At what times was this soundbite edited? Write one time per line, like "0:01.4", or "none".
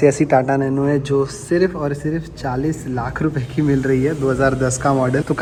none